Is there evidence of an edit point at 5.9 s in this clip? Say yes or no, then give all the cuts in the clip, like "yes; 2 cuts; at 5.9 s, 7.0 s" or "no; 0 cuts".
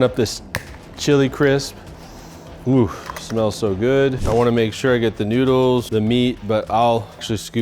yes; 2 cuts; at 4.2 s, 5.9 s